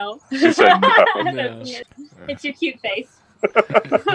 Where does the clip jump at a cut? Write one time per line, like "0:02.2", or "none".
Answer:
0:01.7